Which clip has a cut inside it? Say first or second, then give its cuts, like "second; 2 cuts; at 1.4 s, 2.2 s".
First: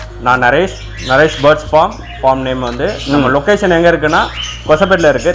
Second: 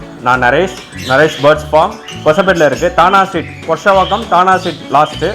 second; 1 cut; at 2.0 s